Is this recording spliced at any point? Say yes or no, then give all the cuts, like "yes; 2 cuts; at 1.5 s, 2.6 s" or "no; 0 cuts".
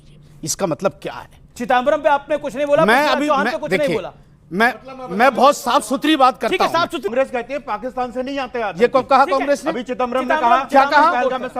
yes; 1 cut; at 7.1 s